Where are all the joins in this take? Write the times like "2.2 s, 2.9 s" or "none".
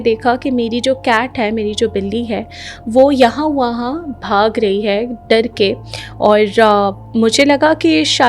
none